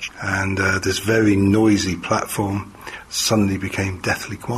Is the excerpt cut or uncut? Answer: uncut